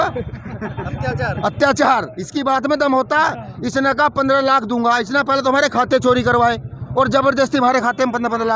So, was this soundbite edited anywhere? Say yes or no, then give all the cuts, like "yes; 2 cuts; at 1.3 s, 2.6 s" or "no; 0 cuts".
no; 0 cuts